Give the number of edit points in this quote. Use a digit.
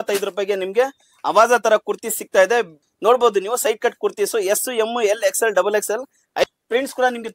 2